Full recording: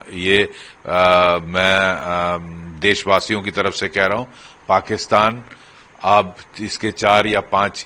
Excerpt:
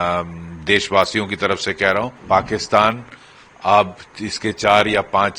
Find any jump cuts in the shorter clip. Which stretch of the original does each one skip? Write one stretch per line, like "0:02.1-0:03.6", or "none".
0:04.3-0:04.6